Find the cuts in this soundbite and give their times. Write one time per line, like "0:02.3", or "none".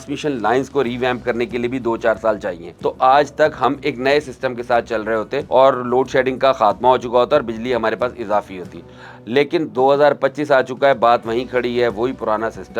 0:02.6
0:05.4